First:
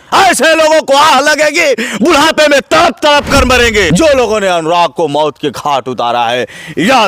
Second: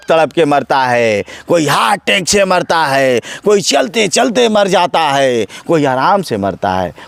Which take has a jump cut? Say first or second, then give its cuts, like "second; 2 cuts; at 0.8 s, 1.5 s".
first; 1 cut; at 3.9 s